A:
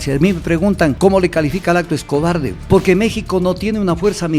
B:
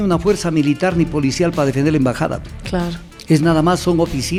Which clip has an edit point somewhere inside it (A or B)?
A